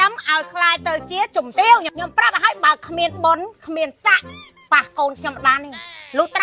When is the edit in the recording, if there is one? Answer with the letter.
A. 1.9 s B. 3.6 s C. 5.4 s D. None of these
A